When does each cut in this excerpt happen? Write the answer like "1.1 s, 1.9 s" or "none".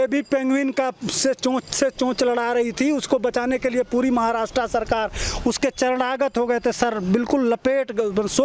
none